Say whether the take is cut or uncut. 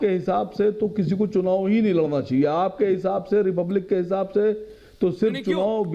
uncut